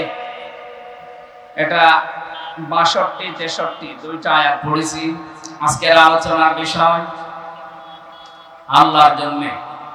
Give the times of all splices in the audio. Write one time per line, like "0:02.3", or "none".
0:01.4